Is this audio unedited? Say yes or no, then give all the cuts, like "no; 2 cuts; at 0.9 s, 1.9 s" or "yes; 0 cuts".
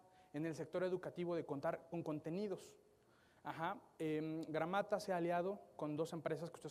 yes; 0 cuts